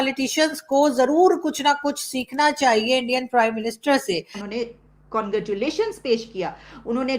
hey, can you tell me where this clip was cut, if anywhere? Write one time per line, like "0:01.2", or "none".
0:04.4